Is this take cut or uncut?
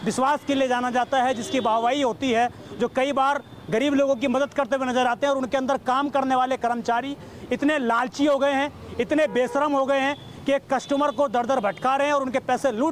uncut